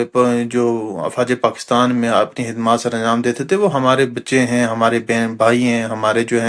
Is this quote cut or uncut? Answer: uncut